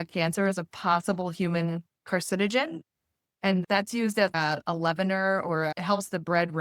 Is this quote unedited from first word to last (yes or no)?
no